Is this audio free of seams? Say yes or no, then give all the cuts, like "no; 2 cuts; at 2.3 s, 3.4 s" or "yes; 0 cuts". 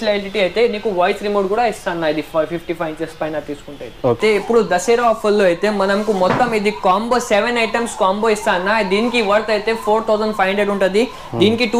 no; 1 cut; at 4.2 s